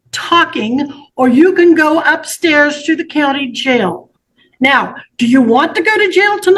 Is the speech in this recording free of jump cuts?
yes; 0 cuts

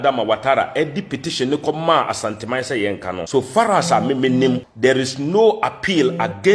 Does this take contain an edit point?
yes; 2 cuts; at 3.2 s, 4.7 s

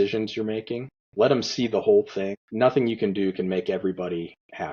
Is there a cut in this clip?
yes; 2 cuts; at 1.0 s, 2.4 s

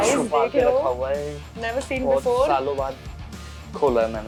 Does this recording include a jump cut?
no; 0 cuts

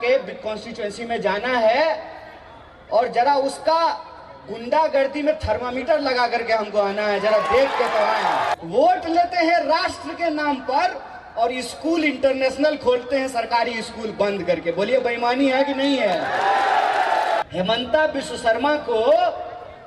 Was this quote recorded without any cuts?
no; 2 cuts; at 8.5 s, 17.4 s

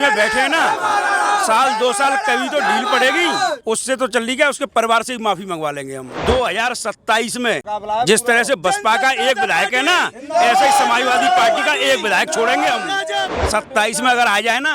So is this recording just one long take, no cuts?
no; 3 cuts; at 6.1 s, 7.6 s, 13.3 s

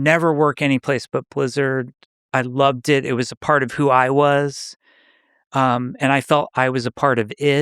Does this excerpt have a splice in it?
no; 0 cuts

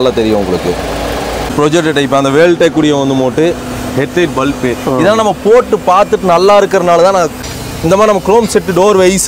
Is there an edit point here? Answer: yes; 2 cuts; at 1.5 s, 7.4 s

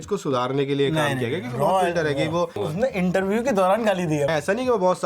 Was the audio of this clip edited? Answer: yes; 2 cuts; at 2.6 s, 4.3 s

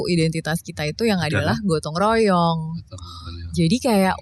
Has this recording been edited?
no; 0 cuts

